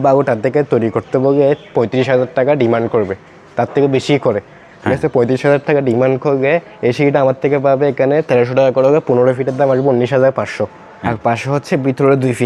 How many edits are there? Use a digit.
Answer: 1